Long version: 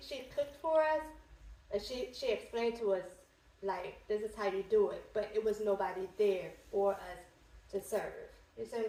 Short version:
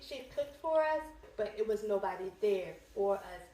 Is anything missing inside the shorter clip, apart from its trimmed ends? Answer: yes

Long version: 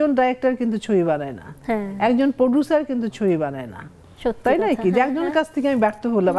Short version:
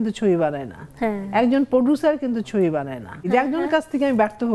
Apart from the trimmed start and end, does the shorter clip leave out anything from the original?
yes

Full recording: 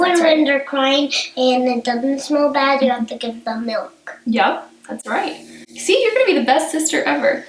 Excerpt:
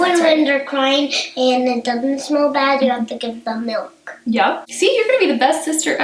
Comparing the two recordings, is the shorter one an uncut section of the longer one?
no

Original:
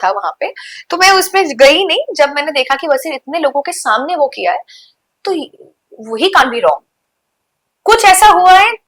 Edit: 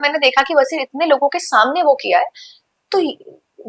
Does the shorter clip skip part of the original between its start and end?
no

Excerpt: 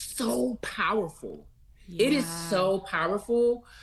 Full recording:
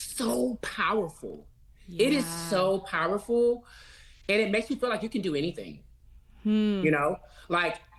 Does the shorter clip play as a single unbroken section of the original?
yes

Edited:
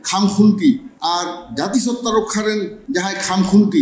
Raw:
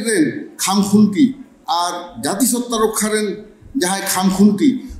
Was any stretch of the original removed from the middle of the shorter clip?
yes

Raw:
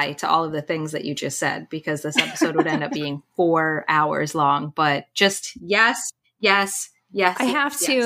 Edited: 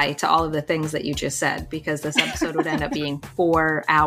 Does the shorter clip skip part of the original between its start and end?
no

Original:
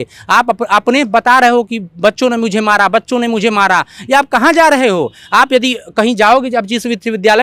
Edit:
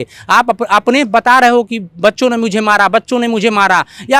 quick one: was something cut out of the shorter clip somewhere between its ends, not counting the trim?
no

